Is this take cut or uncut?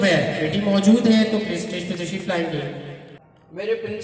cut